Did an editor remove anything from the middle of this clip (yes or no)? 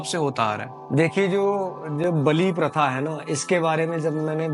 no